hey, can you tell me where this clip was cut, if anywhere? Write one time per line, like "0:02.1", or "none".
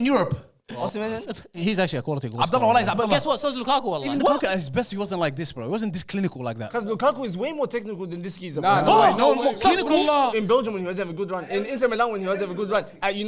0:01.6
0:04.0
0:06.7
0:10.3